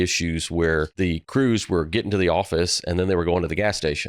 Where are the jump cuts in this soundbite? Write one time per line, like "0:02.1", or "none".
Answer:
0:00.9